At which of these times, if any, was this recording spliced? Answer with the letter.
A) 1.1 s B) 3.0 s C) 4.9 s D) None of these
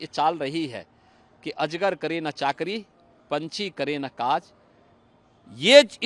D